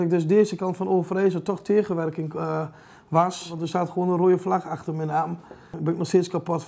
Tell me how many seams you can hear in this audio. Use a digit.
2